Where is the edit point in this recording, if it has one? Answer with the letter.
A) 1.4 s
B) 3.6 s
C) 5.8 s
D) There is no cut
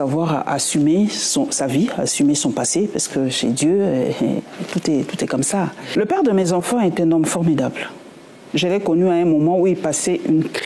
C